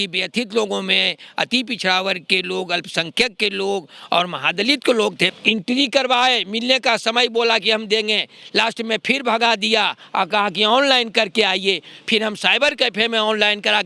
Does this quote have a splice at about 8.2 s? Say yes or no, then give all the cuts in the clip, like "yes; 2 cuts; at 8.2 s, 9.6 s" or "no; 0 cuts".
no; 1 cut; at 5.3 s